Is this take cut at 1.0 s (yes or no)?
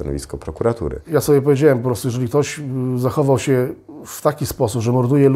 yes